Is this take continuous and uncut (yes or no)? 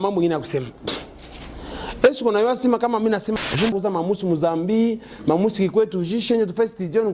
no